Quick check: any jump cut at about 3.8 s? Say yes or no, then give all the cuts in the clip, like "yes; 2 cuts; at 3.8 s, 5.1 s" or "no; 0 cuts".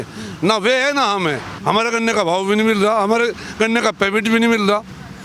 no; 1 cut; at 1.5 s